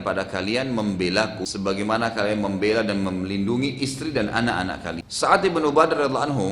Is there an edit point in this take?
yes; 2 cuts; at 1.4 s, 5.1 s

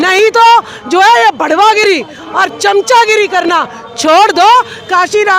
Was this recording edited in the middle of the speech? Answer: no; 0 cuts

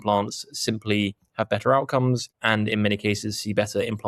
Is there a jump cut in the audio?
no; 0 cuts

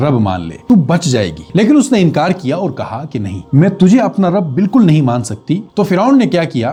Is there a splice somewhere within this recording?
no; 0 cuts

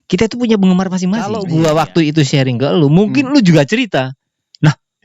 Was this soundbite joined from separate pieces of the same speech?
yes; 1 cut; at 1.3 s

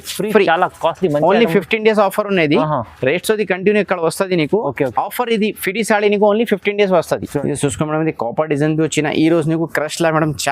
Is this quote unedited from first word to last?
no; 1 cut; at 7.3 s

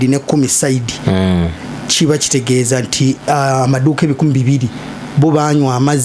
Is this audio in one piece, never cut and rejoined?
yes; 0 cuts

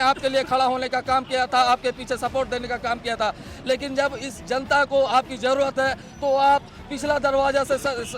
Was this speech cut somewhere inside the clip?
no; 0 cuts

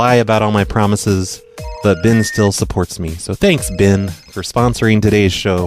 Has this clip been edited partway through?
yes; 1 cut; at 1.4 s

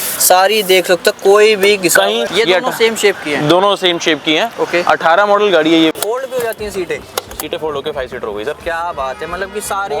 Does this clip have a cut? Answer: yes; 2 cuts; at 2.2 s, 5.9 s

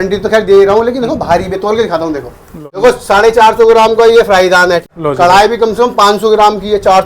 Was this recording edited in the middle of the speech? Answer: yes; 2 cuts; at 2.8 s, 4.8 s

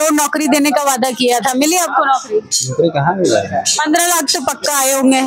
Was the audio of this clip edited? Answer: no; 0 cuts

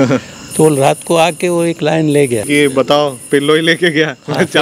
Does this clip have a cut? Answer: yes; 1 cut; at 2.5 s

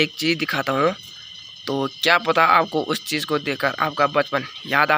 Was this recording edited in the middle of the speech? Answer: no; 0 cuts

